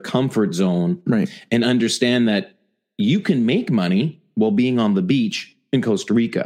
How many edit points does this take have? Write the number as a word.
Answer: zero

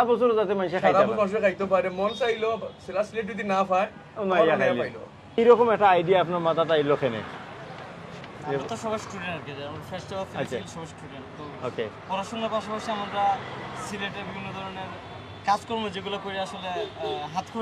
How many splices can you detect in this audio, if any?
one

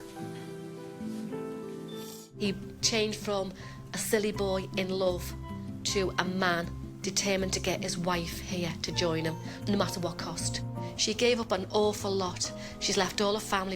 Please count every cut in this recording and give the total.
two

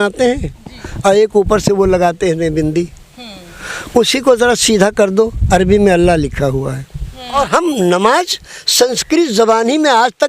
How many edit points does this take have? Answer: one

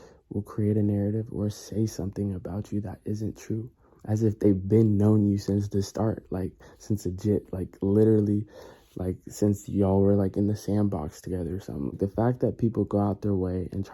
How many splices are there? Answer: one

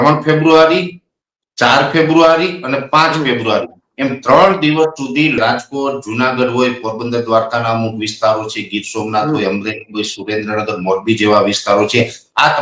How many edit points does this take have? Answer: one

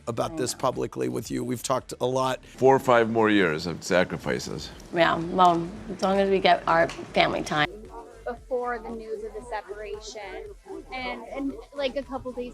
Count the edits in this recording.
two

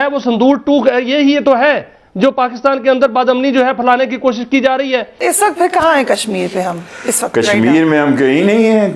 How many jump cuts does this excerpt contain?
zero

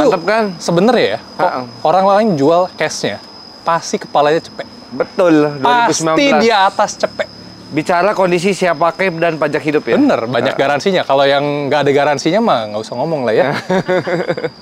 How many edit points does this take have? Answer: zero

